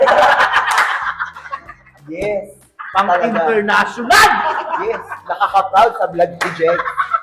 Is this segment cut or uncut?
uncut